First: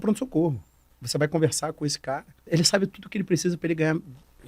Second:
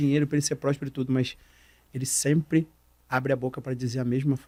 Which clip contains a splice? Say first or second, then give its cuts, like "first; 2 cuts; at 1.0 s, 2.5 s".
first; 2 cuts; at 1.0 s, 2.4 s